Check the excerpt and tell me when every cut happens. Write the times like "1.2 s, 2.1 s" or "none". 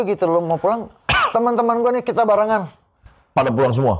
none